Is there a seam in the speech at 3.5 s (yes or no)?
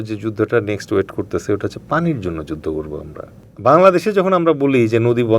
yes